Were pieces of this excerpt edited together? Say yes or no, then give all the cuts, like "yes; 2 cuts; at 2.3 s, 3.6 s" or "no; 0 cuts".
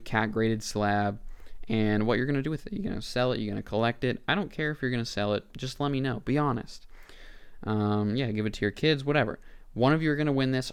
no; 0 cuts